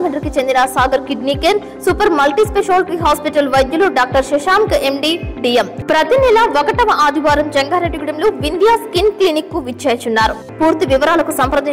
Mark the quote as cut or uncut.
cut